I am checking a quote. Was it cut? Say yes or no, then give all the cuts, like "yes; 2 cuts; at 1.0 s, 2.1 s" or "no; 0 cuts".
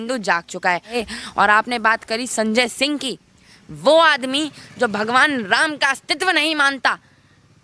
yes; 1 cut; at 0.9 s